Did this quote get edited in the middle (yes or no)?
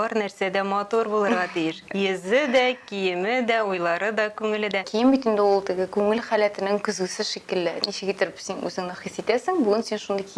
yes